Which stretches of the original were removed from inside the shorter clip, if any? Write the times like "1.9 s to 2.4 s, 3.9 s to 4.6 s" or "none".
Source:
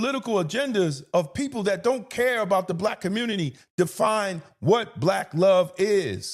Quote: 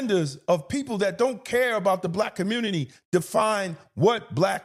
none